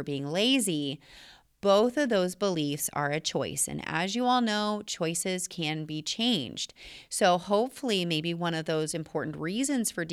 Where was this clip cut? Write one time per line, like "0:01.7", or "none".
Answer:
none